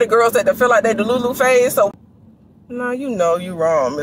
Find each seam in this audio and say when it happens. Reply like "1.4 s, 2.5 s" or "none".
1.9 s